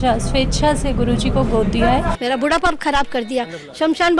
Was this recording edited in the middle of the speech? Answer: yes; 1 cut; at 2.1 s

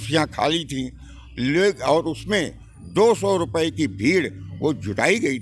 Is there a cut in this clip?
no; 0 cuts

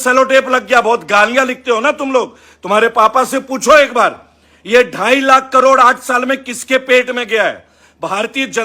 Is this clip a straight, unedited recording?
yes; 0 cuts

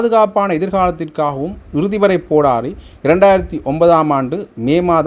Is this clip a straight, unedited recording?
yes; 0 cuts

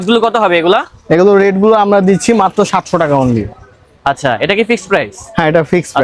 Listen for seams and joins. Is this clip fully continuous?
yes; 0 cuts

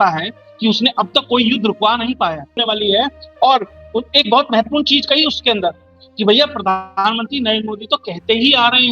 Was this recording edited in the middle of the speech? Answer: yes; 1 cut; at 2.6 s

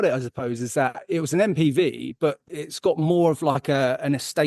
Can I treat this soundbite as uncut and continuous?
yes; 0 cuts

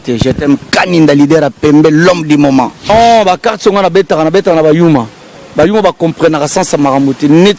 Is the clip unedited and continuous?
no; 1 cut; at 2.9 s

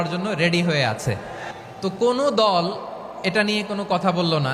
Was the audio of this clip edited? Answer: yes; 1 cut; at 1.5 s

